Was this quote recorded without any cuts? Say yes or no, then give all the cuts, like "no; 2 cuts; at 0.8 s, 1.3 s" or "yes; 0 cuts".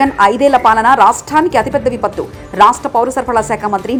yes; 0 cuts